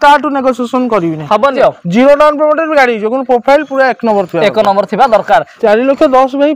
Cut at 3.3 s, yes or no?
no